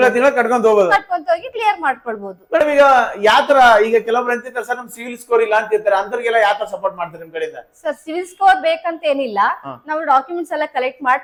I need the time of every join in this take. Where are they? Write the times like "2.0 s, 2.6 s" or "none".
none